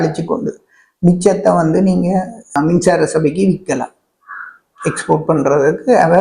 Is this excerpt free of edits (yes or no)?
no